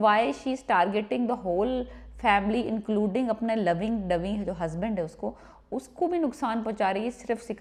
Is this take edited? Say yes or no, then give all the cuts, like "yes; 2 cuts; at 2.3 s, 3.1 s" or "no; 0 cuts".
no; 0 cuts